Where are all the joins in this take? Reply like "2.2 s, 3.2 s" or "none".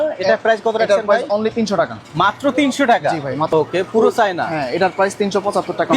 3.5 s